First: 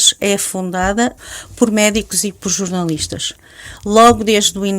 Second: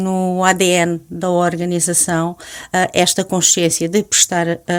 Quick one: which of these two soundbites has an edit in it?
first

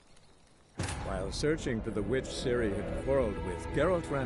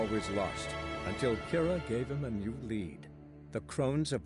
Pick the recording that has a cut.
first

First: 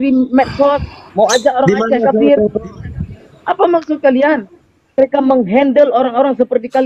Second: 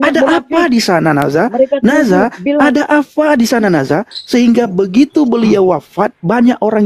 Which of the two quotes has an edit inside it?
first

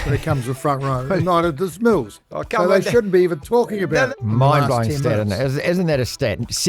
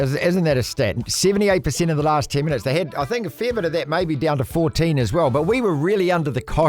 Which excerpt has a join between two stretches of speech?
first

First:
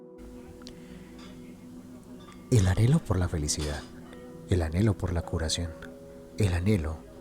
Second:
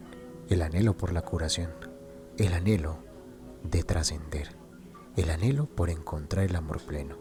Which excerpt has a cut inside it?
first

